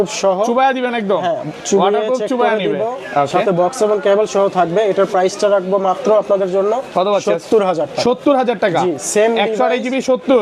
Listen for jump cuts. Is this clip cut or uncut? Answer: uncut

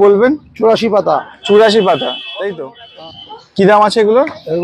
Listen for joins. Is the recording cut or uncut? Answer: cut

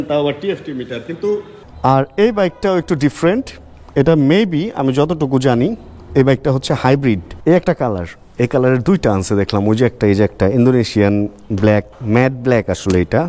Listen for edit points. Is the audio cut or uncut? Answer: cut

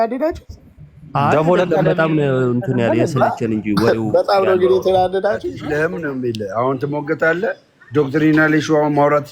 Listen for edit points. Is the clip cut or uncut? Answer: cut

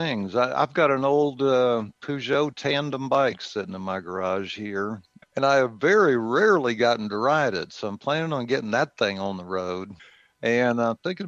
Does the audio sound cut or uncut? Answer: cut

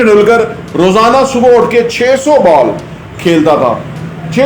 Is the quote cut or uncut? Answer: uncut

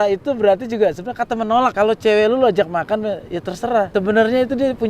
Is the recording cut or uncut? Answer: cut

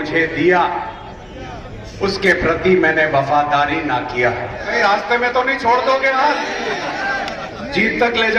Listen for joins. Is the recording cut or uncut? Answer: cut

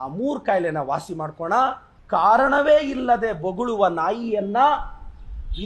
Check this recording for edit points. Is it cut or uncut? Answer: cut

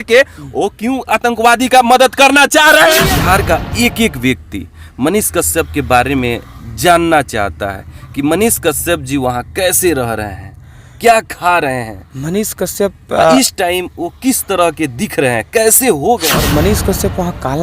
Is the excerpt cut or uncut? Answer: cut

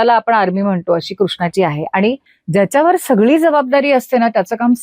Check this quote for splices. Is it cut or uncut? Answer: cut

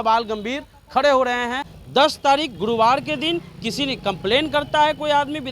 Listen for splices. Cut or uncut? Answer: cut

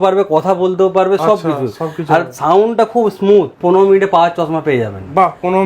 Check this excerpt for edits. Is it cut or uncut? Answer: cut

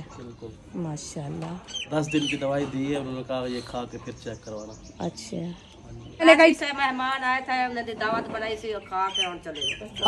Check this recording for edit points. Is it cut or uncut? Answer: cut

